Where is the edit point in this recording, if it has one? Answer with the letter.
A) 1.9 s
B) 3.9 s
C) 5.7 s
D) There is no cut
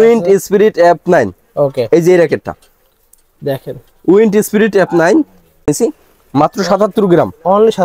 C